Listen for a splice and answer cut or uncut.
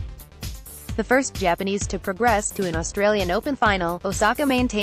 uncut